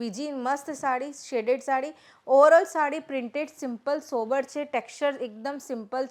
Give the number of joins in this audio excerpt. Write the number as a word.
zero